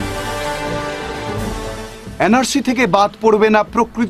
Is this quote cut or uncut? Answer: uncut